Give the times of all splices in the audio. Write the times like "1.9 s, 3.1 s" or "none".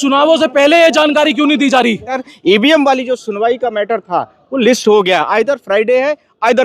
2.3 s